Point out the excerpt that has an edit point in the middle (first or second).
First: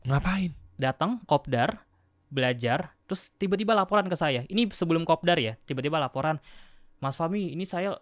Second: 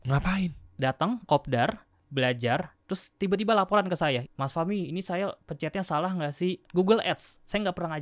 second